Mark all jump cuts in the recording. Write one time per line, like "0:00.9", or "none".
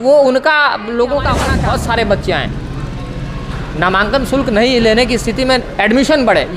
0:01.5

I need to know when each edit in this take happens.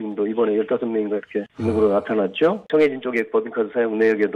0:01.5
0:02.6

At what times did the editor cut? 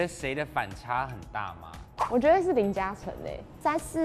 none

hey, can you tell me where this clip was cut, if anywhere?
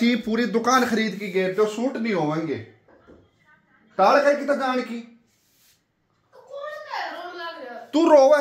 none

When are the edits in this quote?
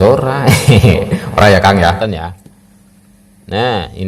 0:02.0

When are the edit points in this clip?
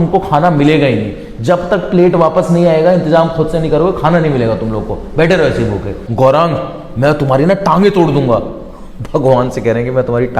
0:06.0

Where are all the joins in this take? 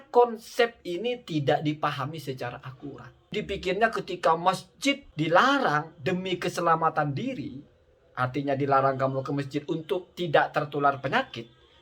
0:03.3
0:05.1

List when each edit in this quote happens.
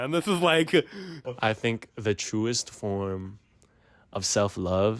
0:01.3

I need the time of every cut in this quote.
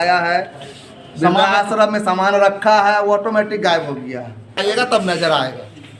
0:04.6

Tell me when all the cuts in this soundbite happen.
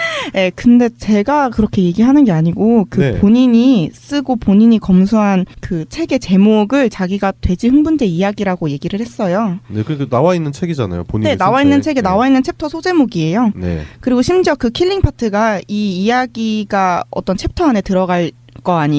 0:15.5

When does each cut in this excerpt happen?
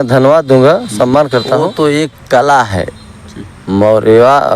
0:01.7

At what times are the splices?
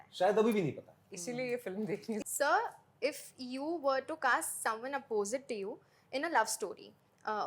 0:02.2

